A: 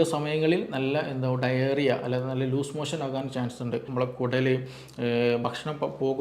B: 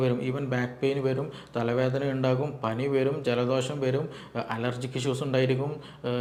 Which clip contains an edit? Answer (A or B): A